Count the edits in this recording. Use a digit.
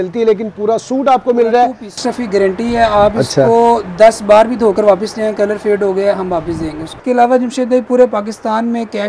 2